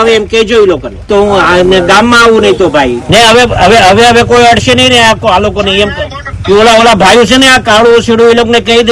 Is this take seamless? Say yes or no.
no